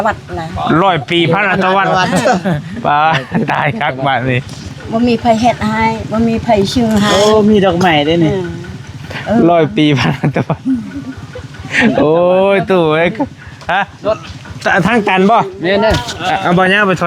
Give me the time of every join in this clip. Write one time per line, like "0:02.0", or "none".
none